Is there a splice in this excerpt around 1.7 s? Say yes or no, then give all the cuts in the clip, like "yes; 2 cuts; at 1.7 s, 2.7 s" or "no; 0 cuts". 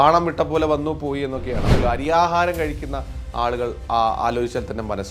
yes; 1 cut; at 1.7 s